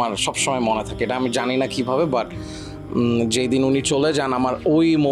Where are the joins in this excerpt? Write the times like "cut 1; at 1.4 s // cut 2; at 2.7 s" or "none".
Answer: none

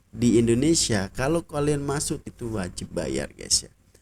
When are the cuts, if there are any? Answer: cut 1; at 2.2 s

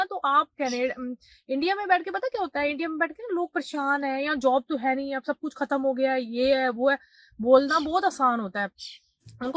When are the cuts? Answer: none

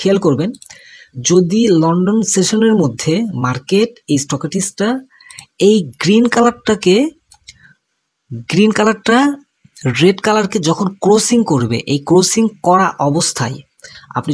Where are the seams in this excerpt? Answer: none

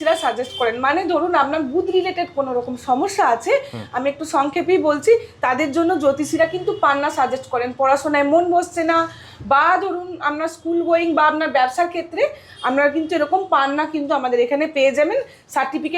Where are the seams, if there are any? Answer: none

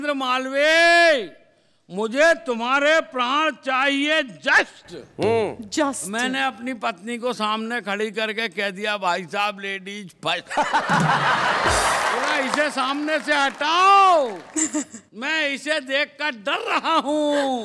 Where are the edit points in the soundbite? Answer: cut 1; at 12.3 s

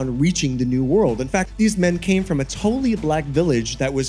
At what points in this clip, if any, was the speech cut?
cut 1; at 1.5 s

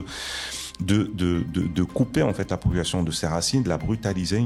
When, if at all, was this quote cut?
none

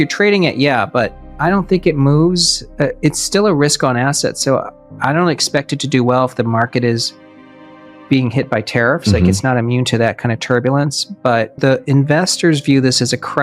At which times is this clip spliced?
cut 1; at 1.2 s // cut 2; at 11.6 s

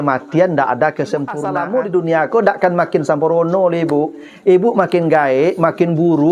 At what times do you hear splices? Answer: cut 1; at 1.5 s

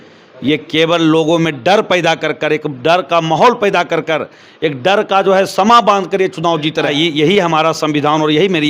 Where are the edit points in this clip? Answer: cut 1; at 6.9 s

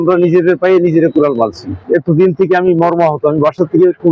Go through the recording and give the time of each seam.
cut 1; at 1.8 s

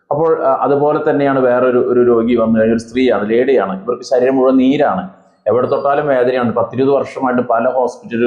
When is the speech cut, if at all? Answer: none

